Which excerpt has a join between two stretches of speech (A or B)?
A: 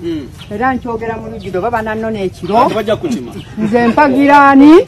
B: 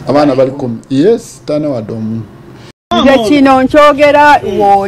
B